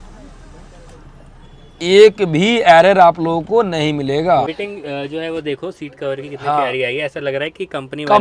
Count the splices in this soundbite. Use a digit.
1